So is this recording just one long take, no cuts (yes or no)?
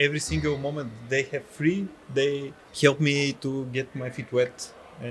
yes